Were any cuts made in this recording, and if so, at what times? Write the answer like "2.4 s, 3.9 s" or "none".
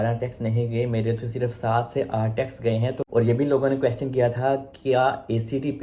3.0 s